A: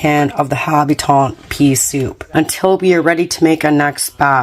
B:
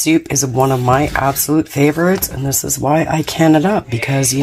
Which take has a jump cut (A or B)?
A